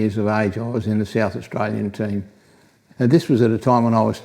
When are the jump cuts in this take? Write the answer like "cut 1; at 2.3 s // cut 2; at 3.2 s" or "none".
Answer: cut 1; at 2.8 s